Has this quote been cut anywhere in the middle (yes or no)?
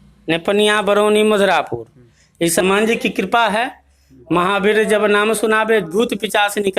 yes